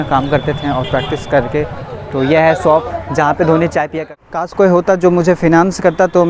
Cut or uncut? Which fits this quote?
cut